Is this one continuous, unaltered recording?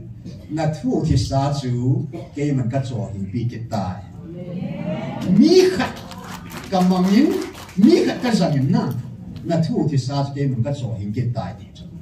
yes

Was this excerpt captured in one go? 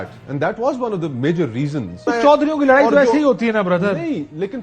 no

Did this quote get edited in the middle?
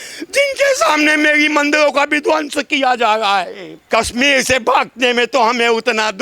yes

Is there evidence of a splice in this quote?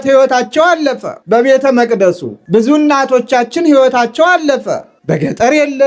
yes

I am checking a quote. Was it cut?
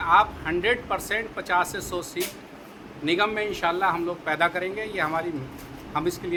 no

